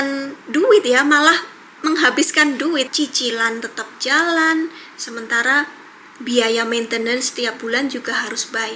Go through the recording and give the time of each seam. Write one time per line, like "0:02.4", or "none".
0:02.9